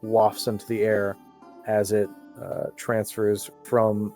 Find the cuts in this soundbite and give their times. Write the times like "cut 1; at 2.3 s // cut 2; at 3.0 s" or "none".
none